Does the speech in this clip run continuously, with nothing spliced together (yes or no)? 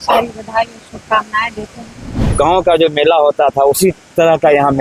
no